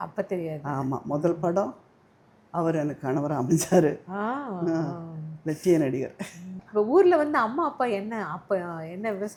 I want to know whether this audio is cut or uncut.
uncut